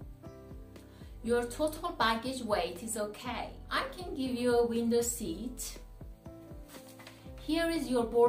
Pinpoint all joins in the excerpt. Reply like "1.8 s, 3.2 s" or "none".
1.1 s, 5.7 s, 7.5 s